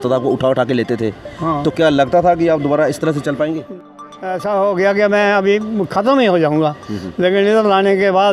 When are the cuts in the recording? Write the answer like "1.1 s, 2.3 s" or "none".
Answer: 3.7 s